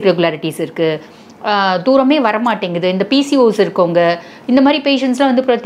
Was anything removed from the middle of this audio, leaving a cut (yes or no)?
no